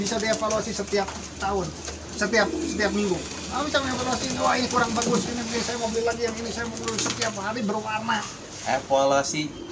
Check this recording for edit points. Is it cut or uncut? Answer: uncut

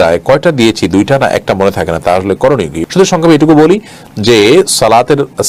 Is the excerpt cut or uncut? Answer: uncut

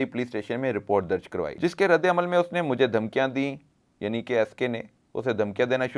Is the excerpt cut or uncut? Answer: cut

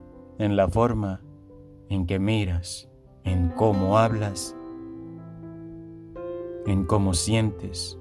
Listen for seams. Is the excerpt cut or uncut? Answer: cut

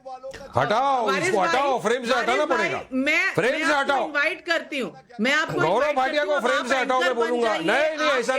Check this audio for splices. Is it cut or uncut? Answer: cut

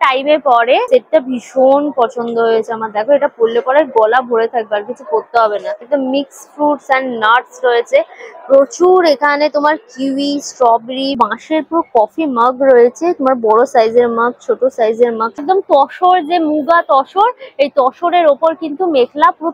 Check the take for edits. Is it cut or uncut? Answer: cut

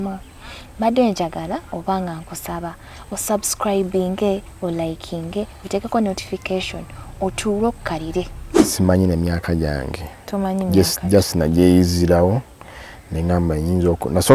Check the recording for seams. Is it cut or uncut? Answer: cut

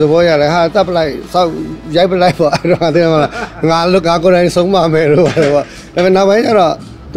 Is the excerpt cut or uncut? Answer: uncut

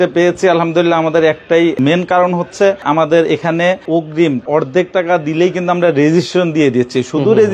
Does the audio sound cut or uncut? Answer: cut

